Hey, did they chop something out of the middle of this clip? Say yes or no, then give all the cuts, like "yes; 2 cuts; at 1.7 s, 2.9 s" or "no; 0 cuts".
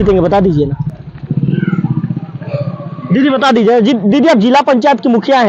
no; 0 cuts